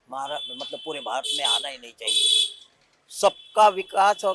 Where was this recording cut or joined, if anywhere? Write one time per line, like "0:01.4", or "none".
none